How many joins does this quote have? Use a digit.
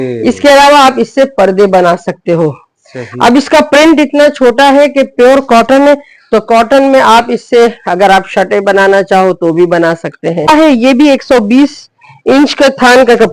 1